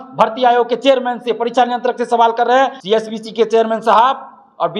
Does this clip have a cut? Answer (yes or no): yes